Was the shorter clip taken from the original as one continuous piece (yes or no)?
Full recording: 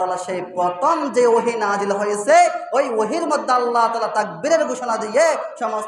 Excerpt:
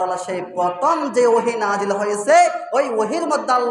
yes